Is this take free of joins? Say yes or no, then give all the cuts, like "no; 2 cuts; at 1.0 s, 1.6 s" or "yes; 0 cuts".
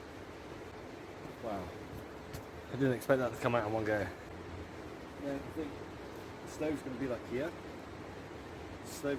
no; 1 cut; at 4.3 s